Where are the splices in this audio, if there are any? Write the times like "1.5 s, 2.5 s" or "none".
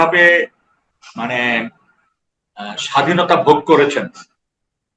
none